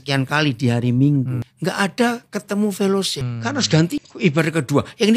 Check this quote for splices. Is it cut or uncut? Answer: cut